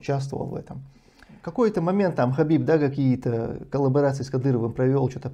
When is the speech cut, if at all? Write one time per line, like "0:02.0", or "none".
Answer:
0:01.4